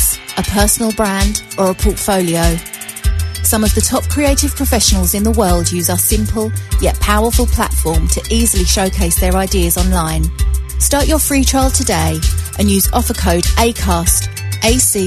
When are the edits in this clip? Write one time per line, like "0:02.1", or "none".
0:03.9

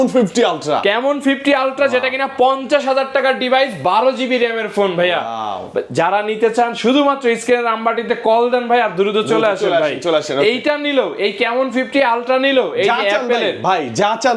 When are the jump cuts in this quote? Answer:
none

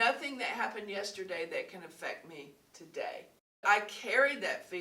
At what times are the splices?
0:03.6

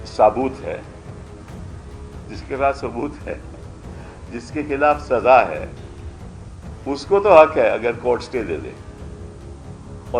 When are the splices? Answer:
0:00.8
0:02.4

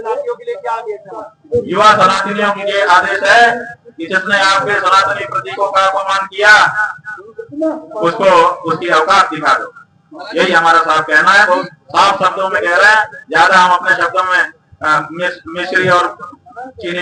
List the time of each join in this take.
none

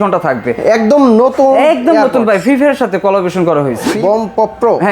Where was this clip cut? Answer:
0:03.9

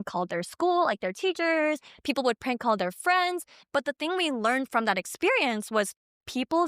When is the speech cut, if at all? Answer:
0:03.6

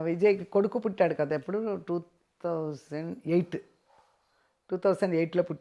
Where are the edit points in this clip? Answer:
none

